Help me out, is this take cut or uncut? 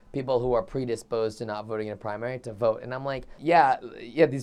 cut